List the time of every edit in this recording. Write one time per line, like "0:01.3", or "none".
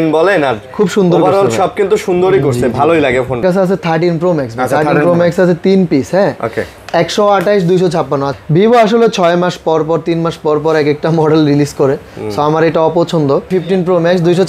0:03.4
0:08.4
0:13.5